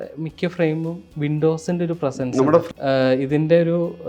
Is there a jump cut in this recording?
yes; 1 cut; at 2.7 s

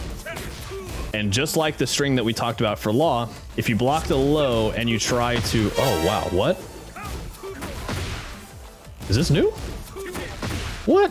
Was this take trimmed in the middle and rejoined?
no; 0 cuts

